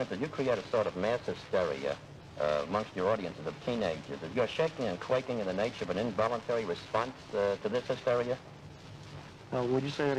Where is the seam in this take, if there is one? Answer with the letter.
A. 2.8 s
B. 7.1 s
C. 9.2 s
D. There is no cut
D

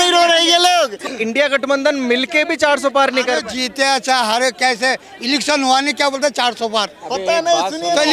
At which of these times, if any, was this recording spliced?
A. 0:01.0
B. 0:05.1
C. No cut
A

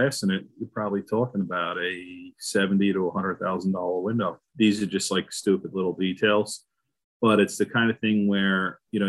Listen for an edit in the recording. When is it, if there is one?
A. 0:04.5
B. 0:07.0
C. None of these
A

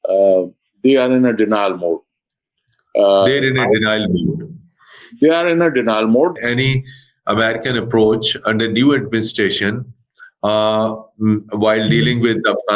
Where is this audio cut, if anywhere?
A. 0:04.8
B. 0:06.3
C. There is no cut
B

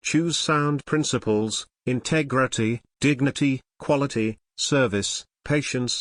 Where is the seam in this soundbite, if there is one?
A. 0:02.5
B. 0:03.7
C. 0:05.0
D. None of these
D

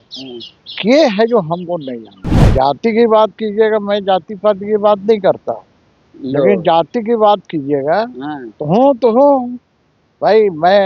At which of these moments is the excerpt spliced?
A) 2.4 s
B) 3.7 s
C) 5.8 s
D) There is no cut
A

